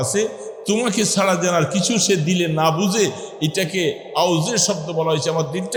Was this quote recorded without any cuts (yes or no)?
yes